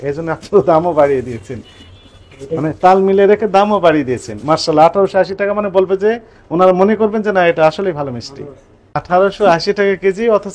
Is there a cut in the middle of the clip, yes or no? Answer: yes